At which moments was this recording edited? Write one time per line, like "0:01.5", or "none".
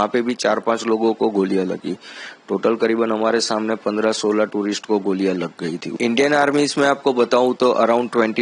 0:05.9